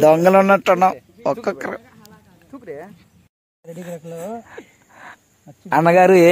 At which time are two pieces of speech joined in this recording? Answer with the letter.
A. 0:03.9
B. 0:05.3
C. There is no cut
C